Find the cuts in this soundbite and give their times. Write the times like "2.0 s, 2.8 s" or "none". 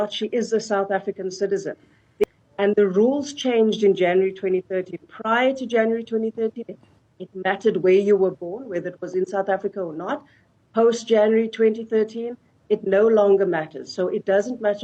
2.2 s